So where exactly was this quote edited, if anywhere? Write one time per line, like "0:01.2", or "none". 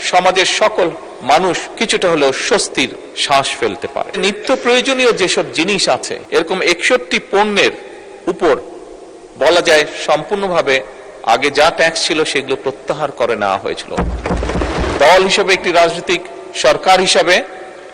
0:01.7
0:04.2
0:06.2
0:15.0

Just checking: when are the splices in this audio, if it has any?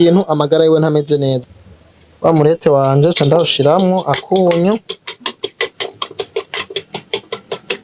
0:01.4

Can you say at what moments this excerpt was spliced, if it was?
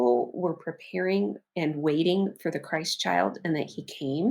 0:01.4

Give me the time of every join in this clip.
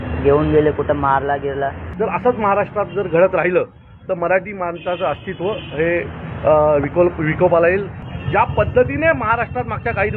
0:01.8
0:08.0

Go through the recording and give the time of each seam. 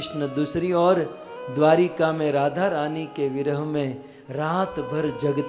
none

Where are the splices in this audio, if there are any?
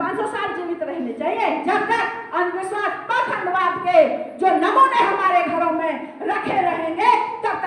0:01.6

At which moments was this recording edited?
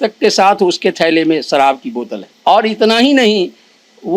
0:02.2

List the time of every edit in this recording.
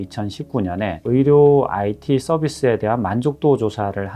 none

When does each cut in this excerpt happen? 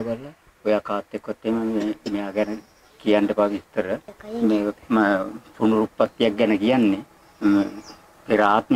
none

